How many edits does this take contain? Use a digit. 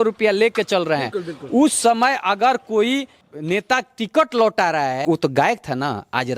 2